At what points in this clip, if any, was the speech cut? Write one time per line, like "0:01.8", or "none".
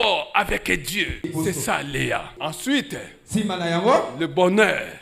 0:01.3
0:02.4